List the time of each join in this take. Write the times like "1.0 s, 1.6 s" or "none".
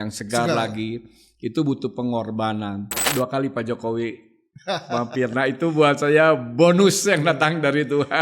3.0 s

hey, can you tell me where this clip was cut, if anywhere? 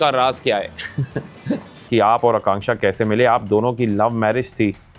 1.9 s

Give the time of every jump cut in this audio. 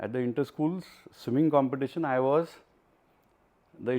none

